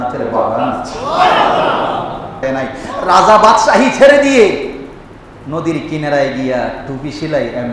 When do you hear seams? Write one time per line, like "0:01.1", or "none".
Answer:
0:02.4